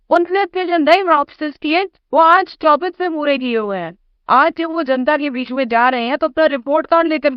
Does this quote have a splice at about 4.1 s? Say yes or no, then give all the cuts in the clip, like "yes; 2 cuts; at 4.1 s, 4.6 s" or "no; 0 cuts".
no; 0 cuts